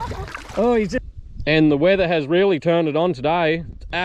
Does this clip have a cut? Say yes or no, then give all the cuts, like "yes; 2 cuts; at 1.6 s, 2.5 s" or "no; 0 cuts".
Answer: yes; 1 cut; at 1.0 s